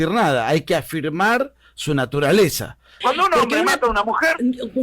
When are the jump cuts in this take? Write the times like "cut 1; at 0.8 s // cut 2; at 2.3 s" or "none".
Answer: cut 1; at 2.9 s